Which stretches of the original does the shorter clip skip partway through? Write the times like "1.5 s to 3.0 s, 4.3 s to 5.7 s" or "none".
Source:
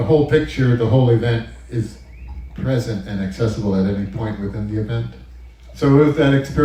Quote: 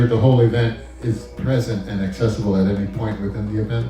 2.0 s to 2.5 s